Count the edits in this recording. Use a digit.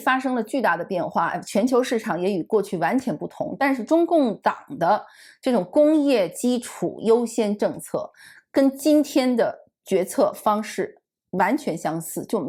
0